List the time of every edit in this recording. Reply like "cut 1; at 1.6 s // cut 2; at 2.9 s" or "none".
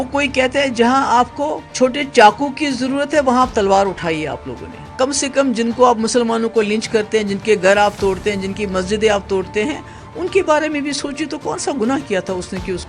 cut 1; at 1.7 s // cut 2; at 4.8 s